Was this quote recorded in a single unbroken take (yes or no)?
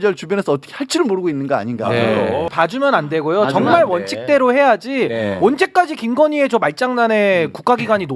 yes